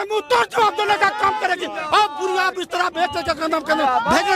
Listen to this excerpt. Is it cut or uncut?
uncut